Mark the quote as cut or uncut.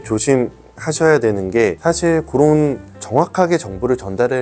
cut